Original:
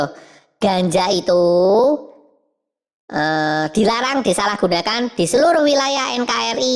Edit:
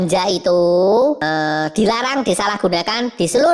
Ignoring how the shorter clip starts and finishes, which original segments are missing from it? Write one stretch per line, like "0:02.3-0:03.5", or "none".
0:02.0-0:03.2